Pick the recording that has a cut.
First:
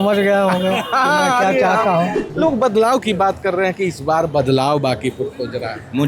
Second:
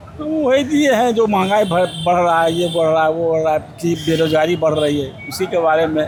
first; 1 cut; at 2.2 s

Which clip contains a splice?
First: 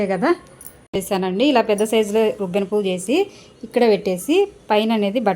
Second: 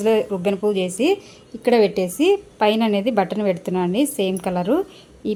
first; 1 cut; at 0.9 s

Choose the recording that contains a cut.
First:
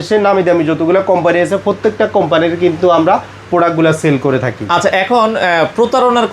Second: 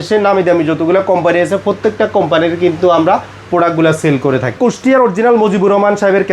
second; 1 cut; at 4.6 s

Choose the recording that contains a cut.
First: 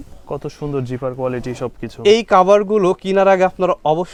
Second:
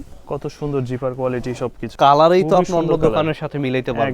second; 1 cut; at 1.9 s

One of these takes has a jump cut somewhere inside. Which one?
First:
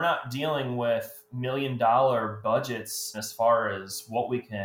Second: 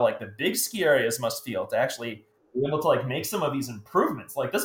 first; 1 cut; at 3.2 s

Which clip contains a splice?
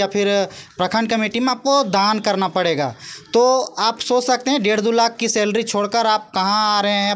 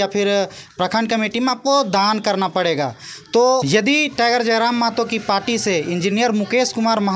second; 1 cut; at 3.6 s

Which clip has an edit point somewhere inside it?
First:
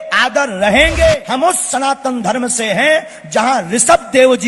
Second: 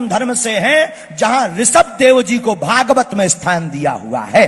first; 1 cut; at 1.2 s

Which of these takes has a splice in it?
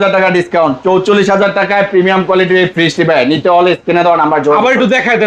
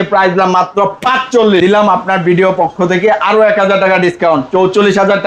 second; 1 cut; at 1.6 s

